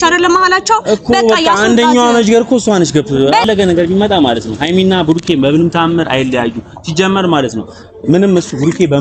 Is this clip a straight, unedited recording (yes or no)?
no